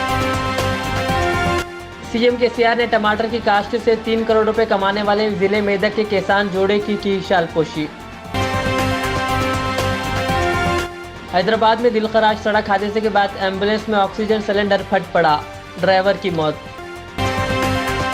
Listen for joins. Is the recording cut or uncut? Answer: cut